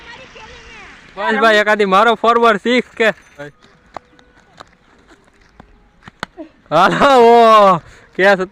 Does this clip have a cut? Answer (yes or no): yes